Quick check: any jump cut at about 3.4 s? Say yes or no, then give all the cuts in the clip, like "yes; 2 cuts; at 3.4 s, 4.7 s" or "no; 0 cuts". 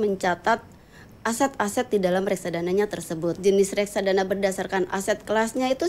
yes; 1 cut; at 3.4 s